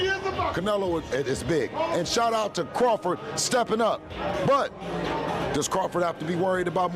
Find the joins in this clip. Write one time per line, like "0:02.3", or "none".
none